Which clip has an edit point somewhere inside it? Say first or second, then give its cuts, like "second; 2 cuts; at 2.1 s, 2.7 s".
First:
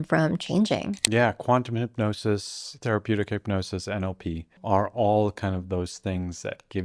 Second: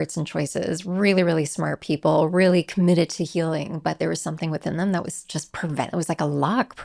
first; 2 cuts; at 1.0 s, 4.5 s